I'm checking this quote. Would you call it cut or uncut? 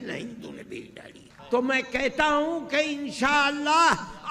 cut